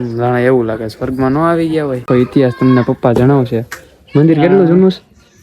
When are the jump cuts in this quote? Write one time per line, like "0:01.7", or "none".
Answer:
0:02.0

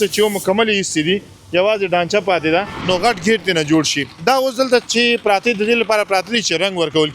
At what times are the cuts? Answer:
0:02.7

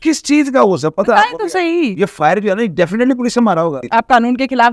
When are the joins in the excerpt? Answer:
0:01.9
0:03.8

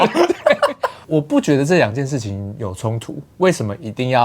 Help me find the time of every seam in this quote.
0:00.9

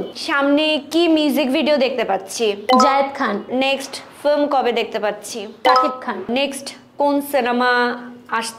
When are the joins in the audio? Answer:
0:03.5
0:06.3

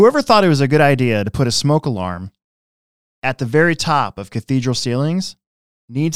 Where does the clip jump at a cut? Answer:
none

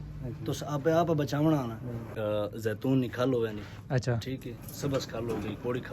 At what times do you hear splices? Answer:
0:02.1

